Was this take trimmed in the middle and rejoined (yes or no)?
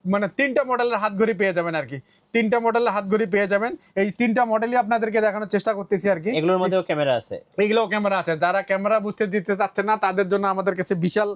no